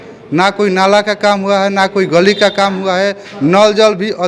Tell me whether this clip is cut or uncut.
uncut